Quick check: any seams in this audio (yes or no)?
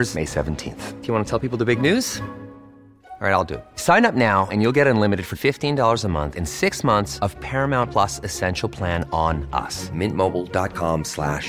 no